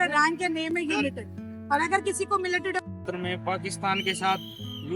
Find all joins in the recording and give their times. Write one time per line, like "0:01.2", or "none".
0:03.1